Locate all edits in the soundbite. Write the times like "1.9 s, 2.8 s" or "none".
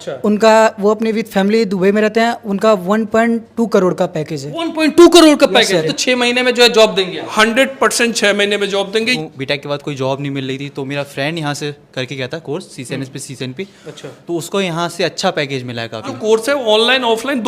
5.9 s, 9.1 s, 16.1 s